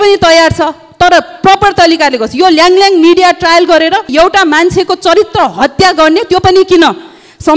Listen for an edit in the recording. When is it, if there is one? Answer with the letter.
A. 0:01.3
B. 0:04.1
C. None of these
B